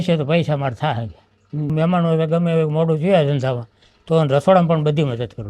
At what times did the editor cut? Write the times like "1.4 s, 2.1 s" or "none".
1.7 s